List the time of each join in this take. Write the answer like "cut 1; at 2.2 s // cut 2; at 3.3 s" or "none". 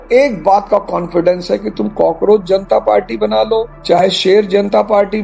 none